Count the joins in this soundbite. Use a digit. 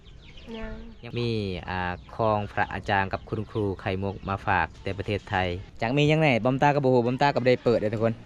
2